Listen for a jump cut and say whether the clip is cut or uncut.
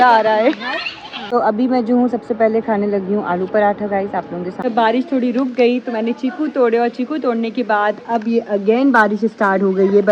cut